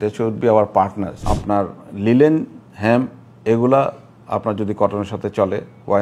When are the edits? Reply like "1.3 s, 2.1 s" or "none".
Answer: 1.2 s